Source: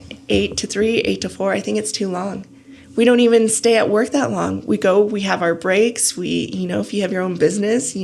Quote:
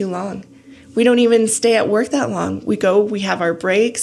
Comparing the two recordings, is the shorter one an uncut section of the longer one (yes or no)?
yes